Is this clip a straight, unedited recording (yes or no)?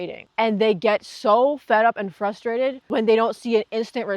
no